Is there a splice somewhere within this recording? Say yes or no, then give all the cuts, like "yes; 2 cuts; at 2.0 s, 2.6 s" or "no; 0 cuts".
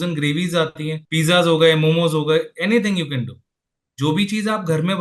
yes; 1 cut; at 1.0 s